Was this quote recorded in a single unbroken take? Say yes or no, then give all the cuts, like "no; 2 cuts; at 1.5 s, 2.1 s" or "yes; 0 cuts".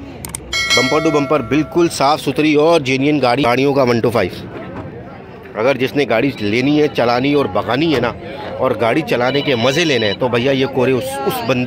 no; 1 cut; at 3.4 s